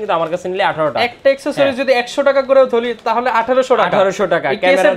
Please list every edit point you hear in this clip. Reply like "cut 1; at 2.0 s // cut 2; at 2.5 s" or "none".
none